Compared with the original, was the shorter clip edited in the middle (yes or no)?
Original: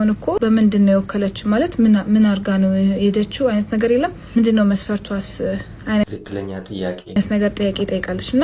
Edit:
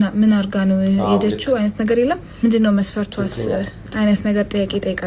yes